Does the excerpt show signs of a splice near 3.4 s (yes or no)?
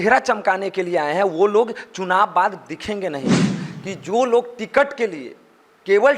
yes